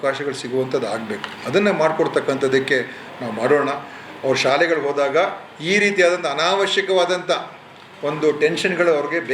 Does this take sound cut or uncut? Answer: uncut